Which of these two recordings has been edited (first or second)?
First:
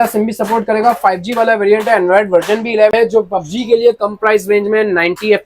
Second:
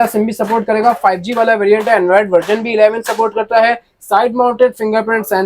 first